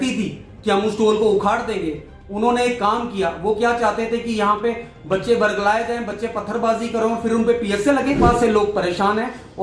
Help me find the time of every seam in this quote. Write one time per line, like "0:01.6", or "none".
0:08.2